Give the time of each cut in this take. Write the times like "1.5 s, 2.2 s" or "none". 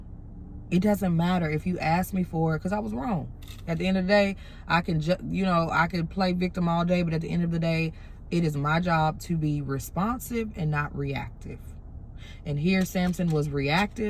none